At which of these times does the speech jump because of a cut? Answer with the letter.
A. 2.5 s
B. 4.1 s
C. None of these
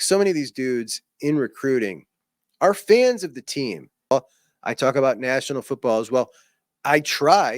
B